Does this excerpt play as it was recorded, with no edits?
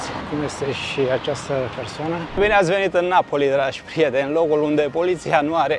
no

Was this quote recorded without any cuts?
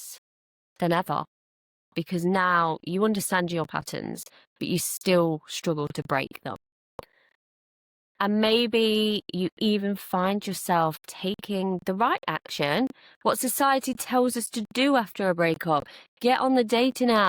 yes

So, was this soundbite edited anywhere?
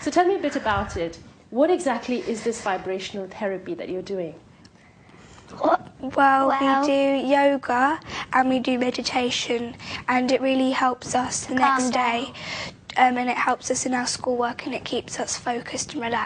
no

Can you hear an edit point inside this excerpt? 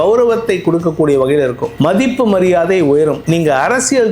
yes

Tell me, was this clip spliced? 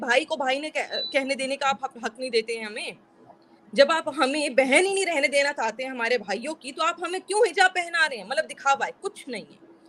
no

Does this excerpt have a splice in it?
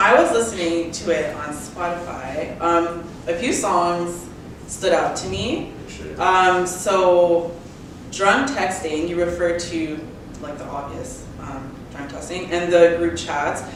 no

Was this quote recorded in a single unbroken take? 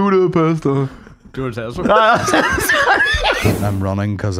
no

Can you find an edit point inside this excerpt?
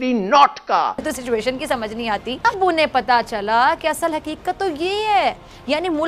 yes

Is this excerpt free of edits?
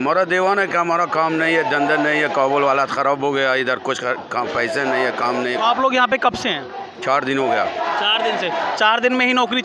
yes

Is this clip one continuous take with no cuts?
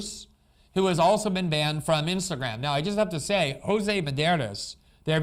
yes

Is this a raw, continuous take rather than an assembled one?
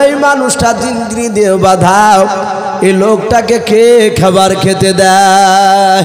yes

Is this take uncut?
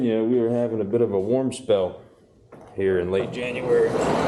yes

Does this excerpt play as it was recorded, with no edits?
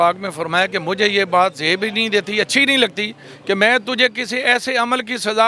yes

